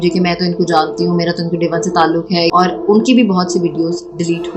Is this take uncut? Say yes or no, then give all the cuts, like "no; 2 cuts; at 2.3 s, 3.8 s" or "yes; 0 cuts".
yes; 0 cuts